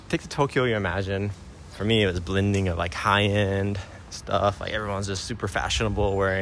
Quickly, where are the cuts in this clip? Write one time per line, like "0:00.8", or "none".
0:01.4